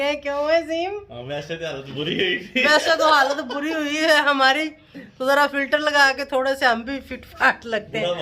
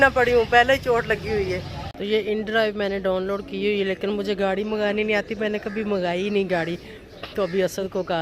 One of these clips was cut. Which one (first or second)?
second